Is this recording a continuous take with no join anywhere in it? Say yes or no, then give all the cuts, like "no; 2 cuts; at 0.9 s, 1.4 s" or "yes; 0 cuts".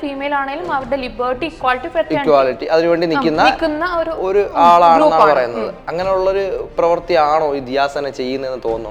yes; 0 cuts